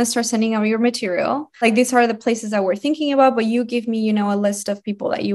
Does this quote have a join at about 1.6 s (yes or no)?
yes